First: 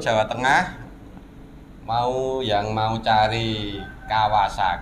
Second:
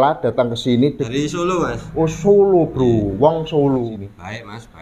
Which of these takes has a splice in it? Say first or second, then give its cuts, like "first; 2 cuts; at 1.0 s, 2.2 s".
second; 2 cuts; at 1.0 s, 3.8 s